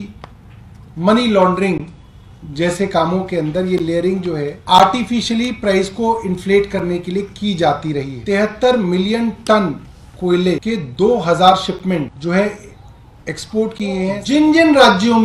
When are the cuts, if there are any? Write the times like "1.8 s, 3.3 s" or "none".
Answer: 4.5 s, 8.2 s, 10.6 s, 12.1 s, 14.2 s